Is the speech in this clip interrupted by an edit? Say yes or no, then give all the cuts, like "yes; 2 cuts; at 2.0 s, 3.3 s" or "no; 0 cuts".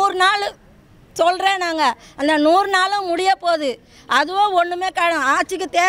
no; 0 cuts